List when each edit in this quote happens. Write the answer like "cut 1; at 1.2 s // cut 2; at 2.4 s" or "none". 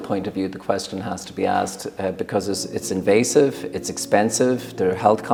none